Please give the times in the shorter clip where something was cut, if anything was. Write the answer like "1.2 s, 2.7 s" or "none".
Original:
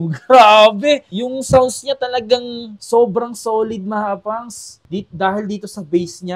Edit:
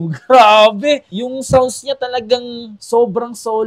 none

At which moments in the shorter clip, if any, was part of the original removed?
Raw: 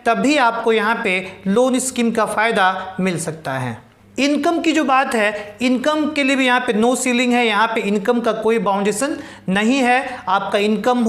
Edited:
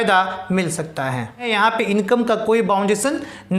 1.5 s

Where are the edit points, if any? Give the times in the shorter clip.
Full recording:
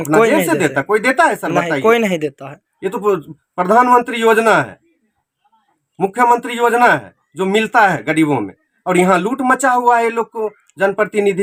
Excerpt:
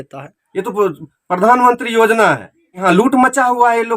2.8 s

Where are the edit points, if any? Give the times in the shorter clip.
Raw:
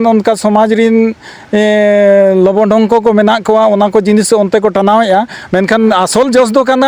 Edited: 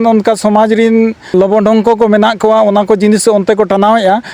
1.3 s

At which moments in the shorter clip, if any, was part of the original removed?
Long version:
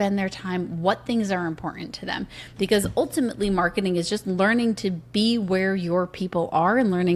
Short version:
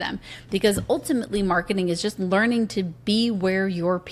none

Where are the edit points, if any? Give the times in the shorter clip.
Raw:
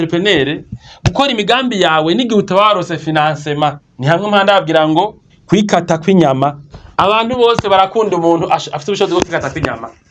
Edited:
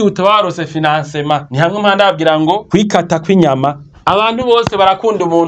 1.5 s, 2.6 s, 3.9 s

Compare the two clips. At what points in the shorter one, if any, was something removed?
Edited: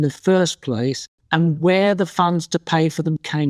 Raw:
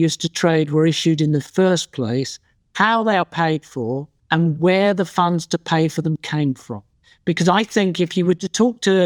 1.1 s

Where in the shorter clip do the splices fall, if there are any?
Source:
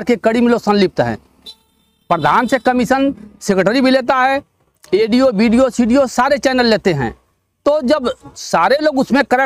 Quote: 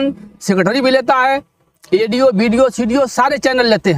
none

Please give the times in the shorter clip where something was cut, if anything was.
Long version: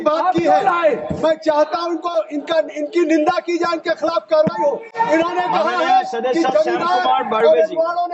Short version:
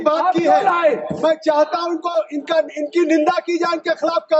none

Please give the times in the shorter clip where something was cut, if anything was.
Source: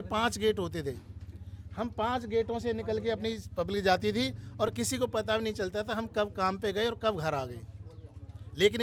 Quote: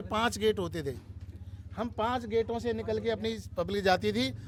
none

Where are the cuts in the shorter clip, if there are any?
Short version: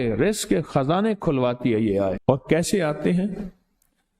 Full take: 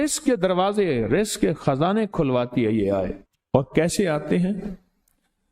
2.2 s

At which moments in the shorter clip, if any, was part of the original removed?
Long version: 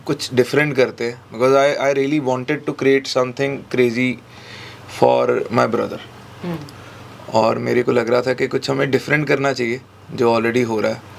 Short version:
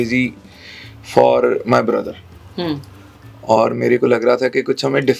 none

